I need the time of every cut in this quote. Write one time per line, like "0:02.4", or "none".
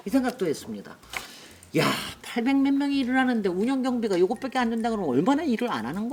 none